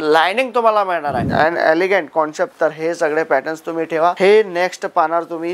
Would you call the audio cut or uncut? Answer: cut